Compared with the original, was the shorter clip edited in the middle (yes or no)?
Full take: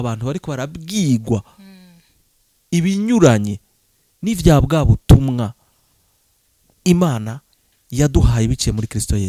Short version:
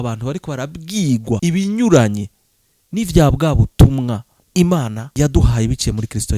yes